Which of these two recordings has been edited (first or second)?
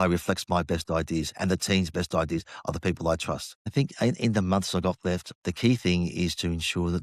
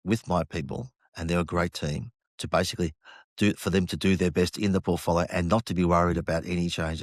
first